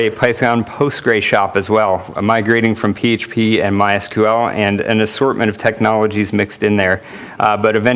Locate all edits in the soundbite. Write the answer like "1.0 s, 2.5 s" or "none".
4.1 s